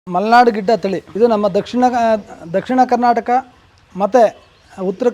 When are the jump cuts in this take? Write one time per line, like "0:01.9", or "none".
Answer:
0:01.0